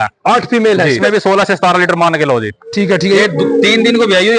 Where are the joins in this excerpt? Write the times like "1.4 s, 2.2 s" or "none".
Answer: 1.0 s, 3.2 s